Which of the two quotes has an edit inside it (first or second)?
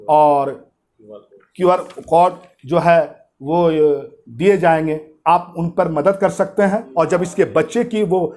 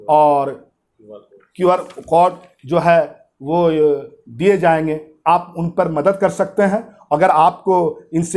first